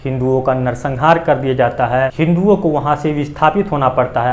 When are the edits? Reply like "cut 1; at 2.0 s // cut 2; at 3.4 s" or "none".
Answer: cut 1; at 2.1 s